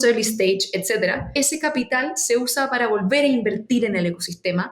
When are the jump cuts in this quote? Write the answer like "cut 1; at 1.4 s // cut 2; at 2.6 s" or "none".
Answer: cut 1; at 1.3 s